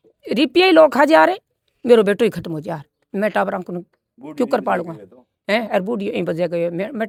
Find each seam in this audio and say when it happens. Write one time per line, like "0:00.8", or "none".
none